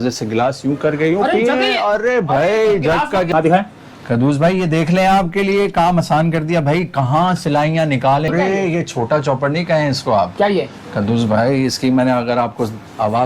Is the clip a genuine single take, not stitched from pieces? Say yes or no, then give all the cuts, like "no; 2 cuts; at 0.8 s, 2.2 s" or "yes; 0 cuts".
no; 2 cuts; at 3.3 s, 8.3 s